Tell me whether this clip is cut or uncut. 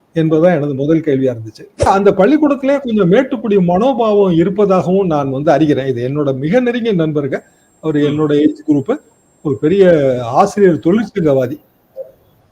cut